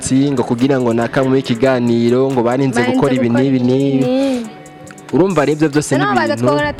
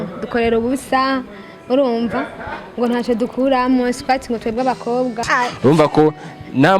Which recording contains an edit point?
second; 1 cut; at 5.2 s

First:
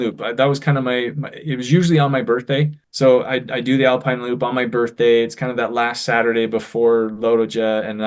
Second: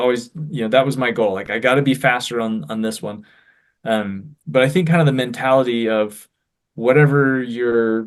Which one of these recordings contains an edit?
first; 1 cut; at 2.8 s

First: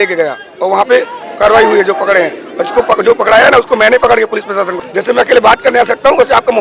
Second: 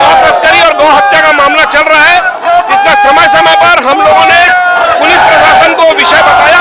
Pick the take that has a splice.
first; 1 cut; at 4.8 s

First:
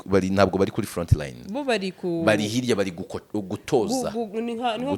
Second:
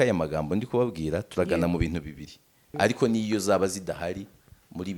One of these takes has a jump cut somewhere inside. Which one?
second; 1 cut; at 2.7 s

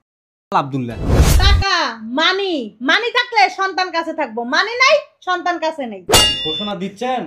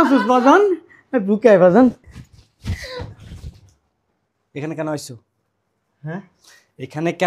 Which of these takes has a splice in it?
first; 2 cuts; at 1.3 s, 6.1 s

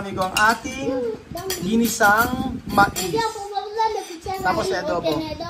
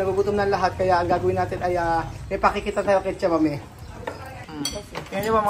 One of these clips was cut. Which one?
second; 1 cut; at 4.4 s

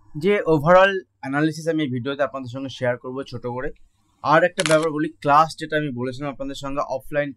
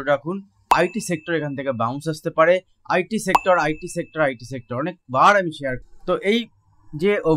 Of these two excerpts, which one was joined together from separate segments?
second; 1 cut; at 5.8 s

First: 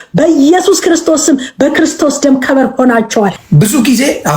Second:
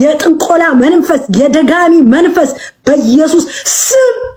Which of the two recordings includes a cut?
first; 1 cut; at 3.4 s

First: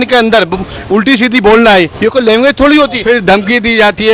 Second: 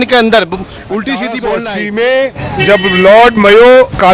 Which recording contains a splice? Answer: second; 1 cut; at 1.6 s

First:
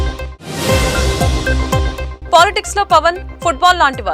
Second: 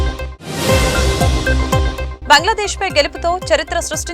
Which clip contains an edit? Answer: second; 1 cut; at 2.0 s

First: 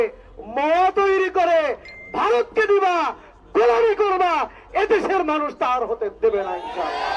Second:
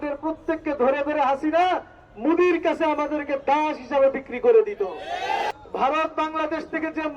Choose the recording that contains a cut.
second; 1 cut; at 5.5 s

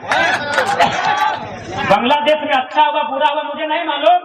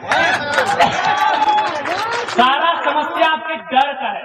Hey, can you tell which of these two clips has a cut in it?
first; 1 cut; at 1.3 s

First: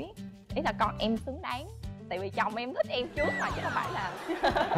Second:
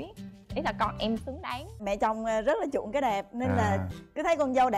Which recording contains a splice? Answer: second; 1 cut; at 1.7 s

